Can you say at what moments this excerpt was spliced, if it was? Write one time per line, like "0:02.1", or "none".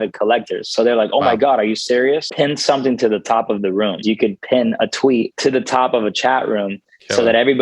0:02.3
0:04.0
0:05.3